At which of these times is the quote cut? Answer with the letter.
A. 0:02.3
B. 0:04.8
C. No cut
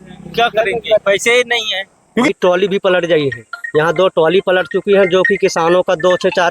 A